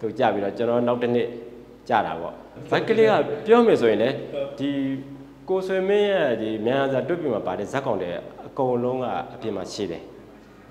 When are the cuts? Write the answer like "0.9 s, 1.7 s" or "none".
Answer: 2.5 s